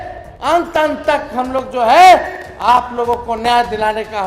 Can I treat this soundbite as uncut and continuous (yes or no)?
yes